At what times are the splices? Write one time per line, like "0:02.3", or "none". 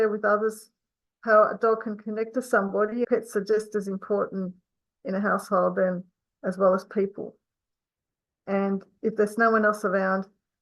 0:03.1

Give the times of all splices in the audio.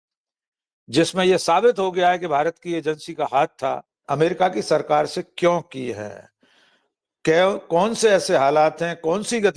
0:03.9

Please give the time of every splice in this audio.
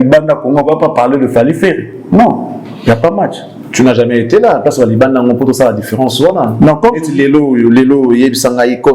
none

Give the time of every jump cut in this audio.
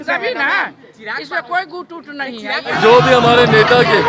0:02.8

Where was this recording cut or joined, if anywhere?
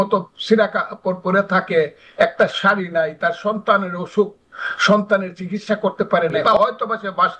0:06.4

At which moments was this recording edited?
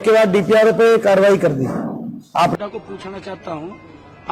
0:02.5

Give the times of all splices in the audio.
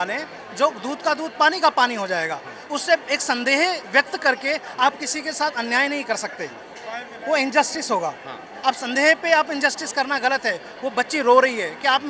none

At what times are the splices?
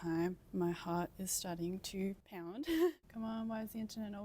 0:03.0

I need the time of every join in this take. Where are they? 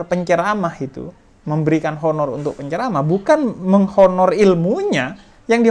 none

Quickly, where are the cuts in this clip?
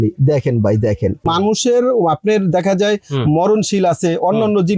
0:01.4

